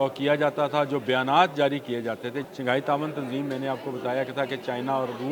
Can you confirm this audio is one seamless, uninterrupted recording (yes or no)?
no